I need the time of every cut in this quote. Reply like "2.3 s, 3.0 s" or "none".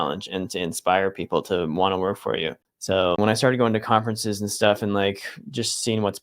3.2 s